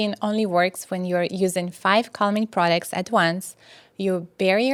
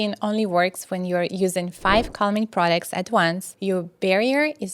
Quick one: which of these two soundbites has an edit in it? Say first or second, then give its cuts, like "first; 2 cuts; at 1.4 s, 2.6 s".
second; 1 cut; at 3.5 s